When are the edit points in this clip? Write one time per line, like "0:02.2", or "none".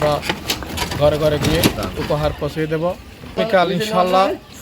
0:03.4

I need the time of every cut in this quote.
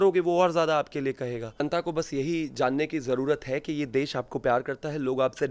0:01.6

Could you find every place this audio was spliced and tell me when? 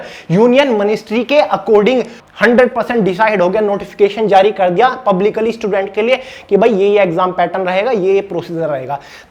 0:02.2

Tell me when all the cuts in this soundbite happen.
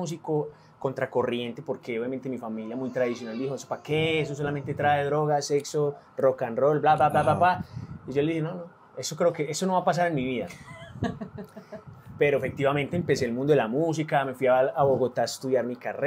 none

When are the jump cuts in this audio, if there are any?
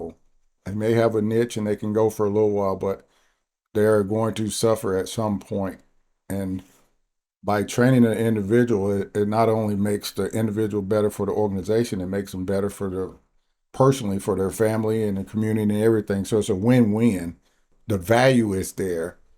0:17.7

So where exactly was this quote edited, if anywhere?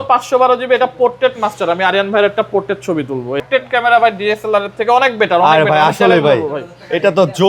0:03.4

